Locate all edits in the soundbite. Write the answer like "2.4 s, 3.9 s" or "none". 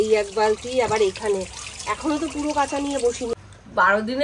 3.3 s